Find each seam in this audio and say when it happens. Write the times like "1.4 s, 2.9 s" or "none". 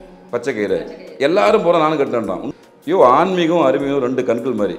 2.5 s